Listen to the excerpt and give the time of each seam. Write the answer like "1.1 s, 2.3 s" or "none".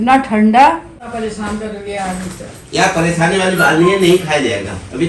1.0 s